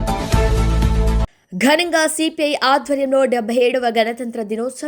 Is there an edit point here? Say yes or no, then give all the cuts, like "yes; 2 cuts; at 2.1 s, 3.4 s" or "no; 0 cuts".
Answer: no; 0 cuts